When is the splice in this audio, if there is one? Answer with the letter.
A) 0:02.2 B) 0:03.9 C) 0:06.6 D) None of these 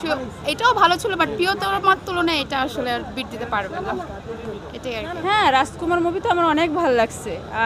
D